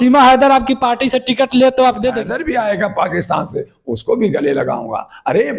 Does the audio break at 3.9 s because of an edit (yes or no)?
no